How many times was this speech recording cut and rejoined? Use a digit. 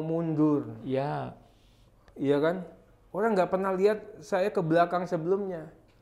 0